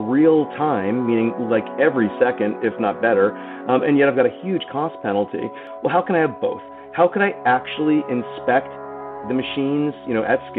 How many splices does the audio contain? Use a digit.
2